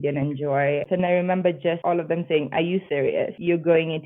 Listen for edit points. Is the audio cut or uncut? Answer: cut